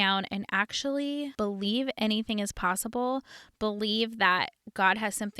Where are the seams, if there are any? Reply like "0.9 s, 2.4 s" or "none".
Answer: 1.3 s

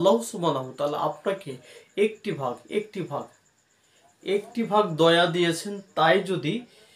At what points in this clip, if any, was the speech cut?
none

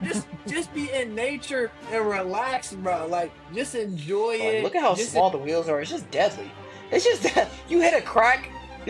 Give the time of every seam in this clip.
4.7 s

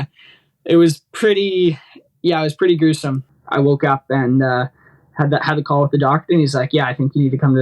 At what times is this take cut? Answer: 3.2 s

